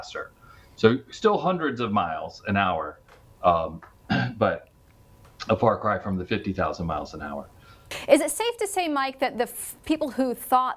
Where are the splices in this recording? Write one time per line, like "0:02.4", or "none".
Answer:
0:07.9